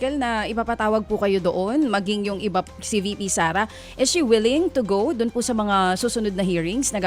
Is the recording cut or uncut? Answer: uncut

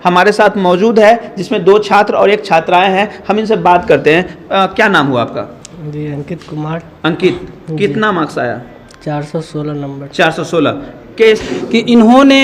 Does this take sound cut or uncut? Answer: cut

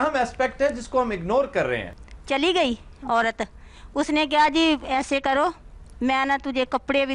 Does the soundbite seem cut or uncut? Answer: cut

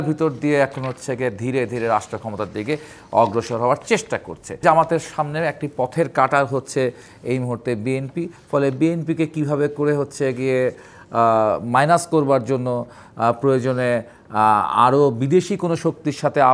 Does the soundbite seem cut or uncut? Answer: cut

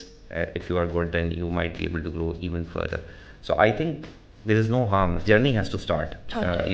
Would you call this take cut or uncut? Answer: uncut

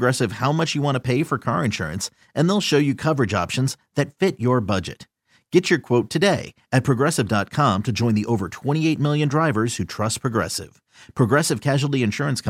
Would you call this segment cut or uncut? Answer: uncut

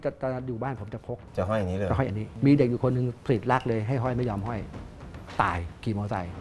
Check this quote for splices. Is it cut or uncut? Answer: cut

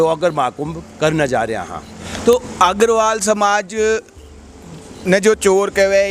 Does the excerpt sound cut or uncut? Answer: uncut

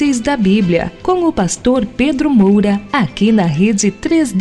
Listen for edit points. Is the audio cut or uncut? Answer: cut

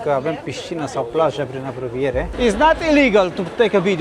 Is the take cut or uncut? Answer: cut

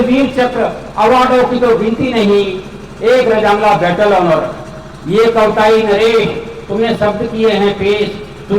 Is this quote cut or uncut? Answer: uncut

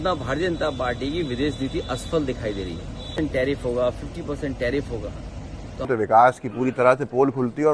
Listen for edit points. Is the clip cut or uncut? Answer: cut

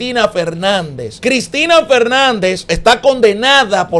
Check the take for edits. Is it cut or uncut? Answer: cut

